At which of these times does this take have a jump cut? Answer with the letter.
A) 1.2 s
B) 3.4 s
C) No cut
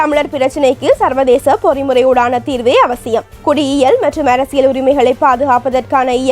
C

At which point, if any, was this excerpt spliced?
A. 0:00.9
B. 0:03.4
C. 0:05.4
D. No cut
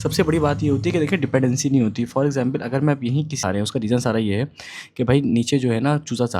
B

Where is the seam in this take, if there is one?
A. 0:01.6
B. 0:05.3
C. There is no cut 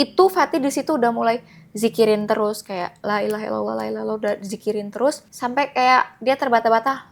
B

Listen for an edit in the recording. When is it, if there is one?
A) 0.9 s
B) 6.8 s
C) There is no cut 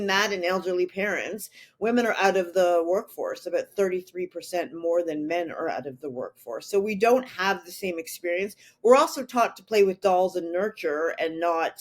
C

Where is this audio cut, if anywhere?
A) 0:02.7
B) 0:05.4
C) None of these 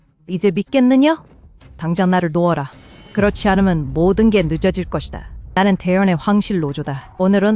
B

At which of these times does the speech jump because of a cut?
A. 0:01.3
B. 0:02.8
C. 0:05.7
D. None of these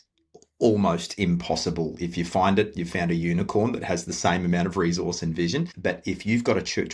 C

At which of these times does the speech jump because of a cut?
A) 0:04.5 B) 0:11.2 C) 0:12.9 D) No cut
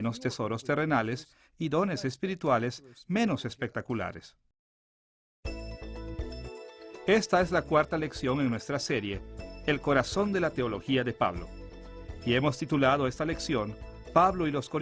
C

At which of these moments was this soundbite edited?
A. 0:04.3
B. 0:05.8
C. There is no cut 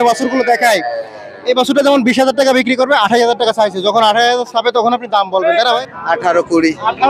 B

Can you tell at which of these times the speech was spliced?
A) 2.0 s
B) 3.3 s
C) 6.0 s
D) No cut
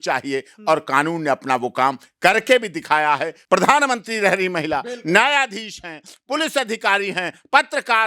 B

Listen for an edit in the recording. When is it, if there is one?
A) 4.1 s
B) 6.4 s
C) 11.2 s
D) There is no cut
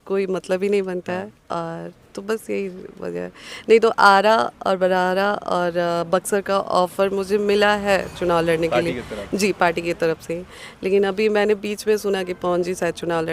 D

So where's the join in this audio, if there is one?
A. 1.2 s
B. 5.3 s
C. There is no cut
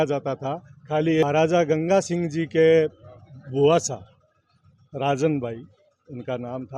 A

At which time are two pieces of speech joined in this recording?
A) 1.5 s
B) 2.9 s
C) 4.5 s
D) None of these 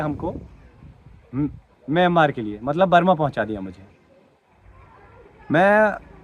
D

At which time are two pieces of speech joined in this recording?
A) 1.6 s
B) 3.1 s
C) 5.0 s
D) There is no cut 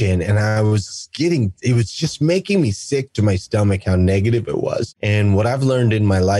C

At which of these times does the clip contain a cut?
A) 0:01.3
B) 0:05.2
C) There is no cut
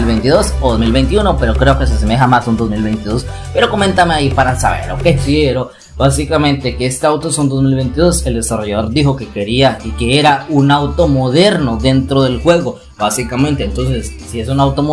B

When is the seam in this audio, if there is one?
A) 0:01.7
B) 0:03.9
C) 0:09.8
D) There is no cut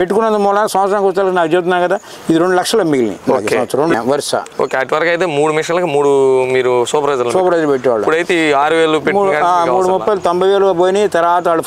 B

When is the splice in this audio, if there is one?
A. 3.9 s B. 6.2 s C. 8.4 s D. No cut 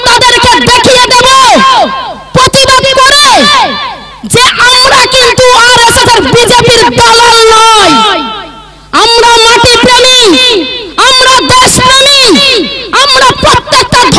D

